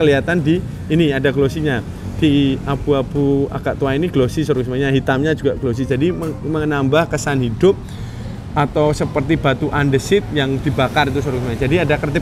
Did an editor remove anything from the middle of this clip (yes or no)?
no